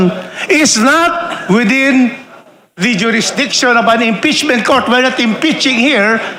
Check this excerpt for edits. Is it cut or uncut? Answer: uncut